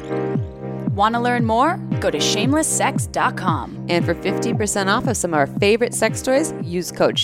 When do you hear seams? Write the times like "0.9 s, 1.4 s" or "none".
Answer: 0.9 s